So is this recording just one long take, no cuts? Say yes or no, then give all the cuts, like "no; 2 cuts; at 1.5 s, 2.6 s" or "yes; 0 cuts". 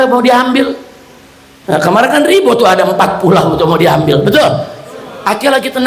yes; 0 cuts